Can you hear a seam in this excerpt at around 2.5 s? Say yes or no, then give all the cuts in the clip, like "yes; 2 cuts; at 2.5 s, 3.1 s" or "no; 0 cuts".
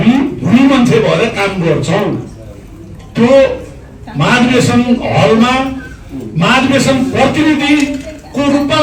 no; 0 cuts